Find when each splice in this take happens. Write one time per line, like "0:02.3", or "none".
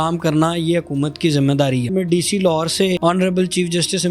0:01.9
0:03.0